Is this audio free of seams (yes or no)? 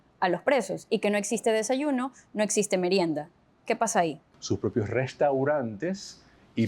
no